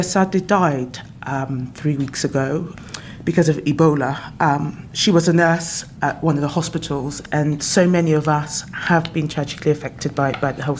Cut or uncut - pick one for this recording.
cut